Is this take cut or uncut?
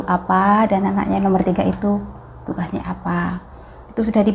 uncut